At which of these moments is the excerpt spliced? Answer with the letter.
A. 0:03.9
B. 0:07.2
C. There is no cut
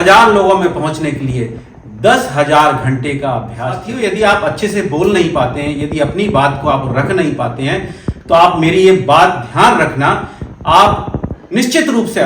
A